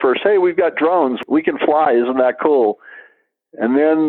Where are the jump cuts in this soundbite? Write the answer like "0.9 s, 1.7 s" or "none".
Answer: 1.2 s